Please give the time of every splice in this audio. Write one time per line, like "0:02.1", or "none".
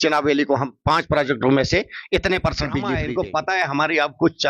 0:03.0